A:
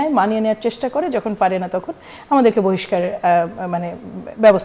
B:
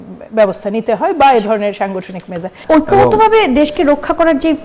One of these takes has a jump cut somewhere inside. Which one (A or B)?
B